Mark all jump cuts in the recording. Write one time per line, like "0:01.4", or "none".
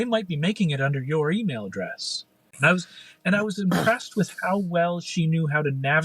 0:02.5